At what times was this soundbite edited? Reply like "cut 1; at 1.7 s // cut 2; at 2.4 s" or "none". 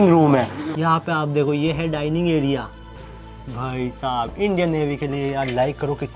none